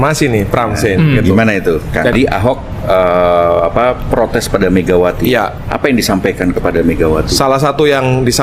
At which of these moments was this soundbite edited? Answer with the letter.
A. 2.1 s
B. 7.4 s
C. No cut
A